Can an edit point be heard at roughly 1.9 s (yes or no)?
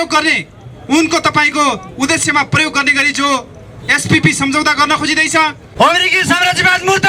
no